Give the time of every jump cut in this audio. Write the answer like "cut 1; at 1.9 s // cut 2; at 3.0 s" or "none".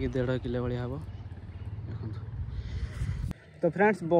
cut 1; at 3.3 s